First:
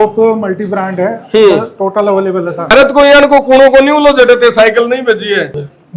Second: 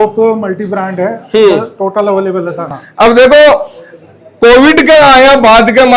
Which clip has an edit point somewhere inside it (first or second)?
first